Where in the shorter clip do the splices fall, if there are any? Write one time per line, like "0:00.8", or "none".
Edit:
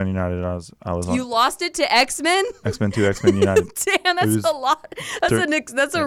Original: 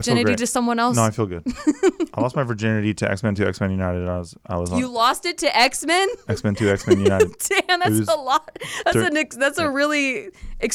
none

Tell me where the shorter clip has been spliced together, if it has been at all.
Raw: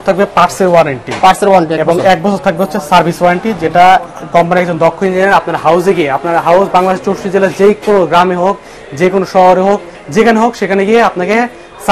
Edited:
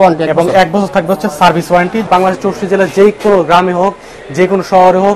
0:02.1

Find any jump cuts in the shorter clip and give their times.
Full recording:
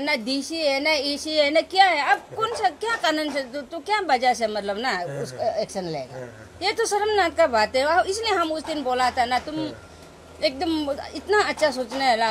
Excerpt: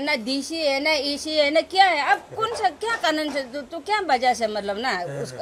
none

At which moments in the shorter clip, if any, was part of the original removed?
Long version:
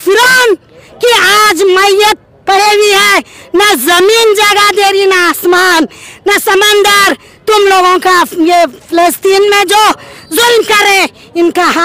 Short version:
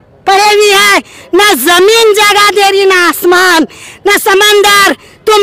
none

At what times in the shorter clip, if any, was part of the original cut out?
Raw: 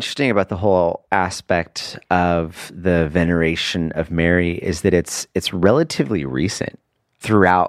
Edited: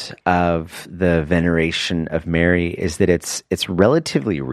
none

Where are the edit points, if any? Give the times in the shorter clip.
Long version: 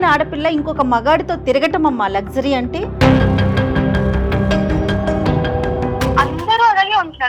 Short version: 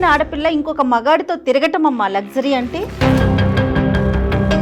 none

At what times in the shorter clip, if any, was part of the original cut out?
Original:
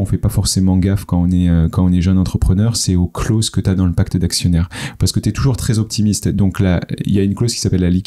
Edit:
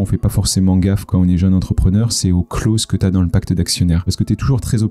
0:01.1
0:04.1

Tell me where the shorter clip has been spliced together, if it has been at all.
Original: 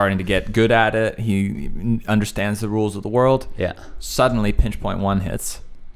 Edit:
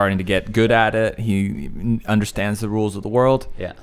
none

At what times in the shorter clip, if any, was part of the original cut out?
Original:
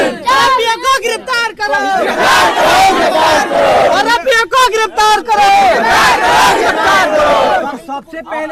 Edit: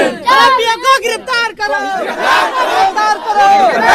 0:03.0

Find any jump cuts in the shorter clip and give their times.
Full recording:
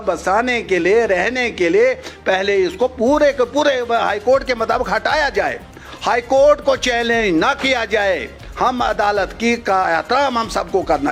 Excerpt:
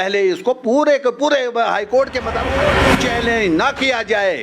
0:02.8

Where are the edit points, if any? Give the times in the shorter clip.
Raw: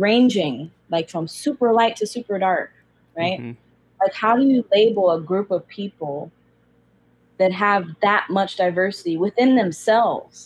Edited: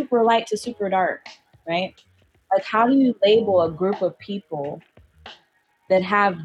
none

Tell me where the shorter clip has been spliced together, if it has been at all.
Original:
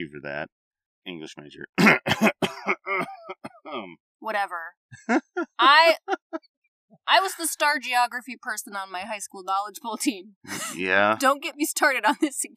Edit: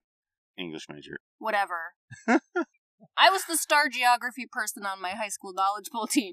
0:01.2
0:02.6

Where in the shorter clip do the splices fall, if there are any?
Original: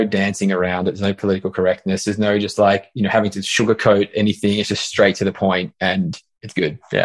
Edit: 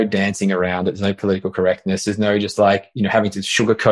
none

